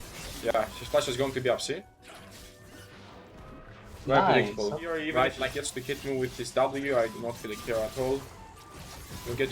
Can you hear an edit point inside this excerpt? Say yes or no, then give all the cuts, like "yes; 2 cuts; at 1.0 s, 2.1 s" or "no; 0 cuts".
yes; 1 cut; at 5.3 s